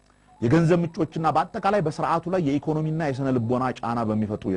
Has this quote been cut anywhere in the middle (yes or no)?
no